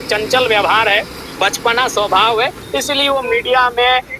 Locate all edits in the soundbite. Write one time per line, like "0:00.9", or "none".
none